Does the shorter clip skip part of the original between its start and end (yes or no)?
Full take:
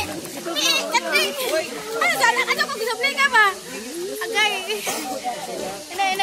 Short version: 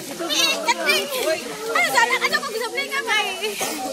yes